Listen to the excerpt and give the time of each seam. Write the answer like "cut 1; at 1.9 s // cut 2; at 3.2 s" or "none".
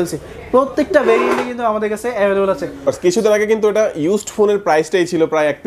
cut 1; at 2.9 s